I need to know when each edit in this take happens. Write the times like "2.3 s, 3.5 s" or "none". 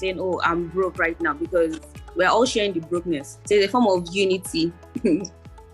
3.3 s